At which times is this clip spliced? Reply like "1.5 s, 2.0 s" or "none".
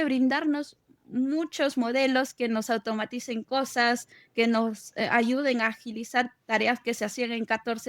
none

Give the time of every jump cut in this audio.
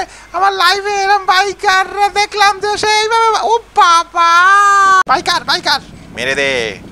5.0 s

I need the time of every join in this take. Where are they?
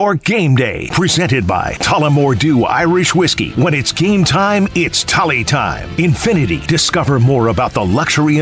none

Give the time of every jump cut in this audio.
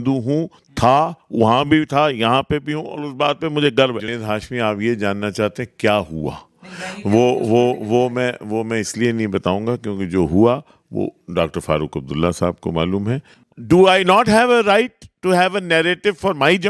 4.1 s, 13.4 s

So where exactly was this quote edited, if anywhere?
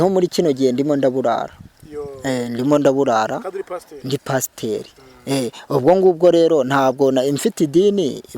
none

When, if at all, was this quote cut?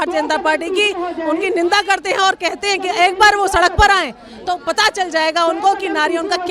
none

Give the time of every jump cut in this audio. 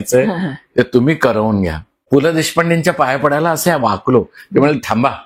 2.1 s

